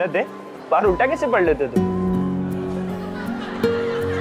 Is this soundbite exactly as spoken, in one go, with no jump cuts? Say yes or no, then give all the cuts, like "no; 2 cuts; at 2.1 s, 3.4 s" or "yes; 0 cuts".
yes; 0 cuts